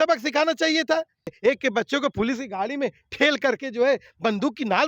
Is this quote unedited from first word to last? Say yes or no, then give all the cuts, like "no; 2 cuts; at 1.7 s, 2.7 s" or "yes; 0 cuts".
no; 1 cut; at 1.4 s